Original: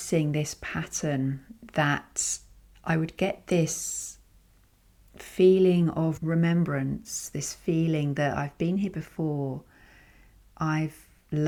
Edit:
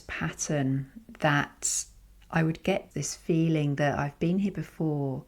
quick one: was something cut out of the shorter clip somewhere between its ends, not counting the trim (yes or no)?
yes